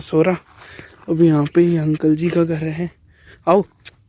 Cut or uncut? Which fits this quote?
uncut